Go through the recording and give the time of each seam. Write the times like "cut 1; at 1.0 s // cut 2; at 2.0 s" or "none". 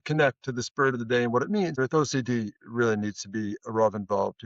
cut 1; at 1.8 s